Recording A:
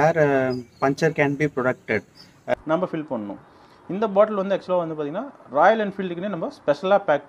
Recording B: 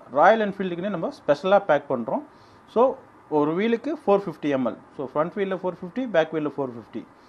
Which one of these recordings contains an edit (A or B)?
A